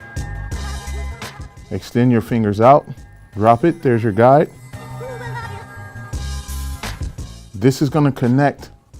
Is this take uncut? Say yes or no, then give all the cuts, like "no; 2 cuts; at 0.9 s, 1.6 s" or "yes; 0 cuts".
no; 1 cut; at 1.4 s